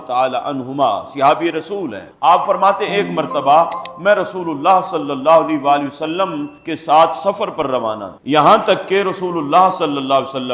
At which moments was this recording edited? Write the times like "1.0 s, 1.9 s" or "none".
none